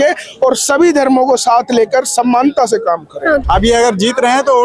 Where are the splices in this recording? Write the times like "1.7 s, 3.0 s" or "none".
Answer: 3.4 s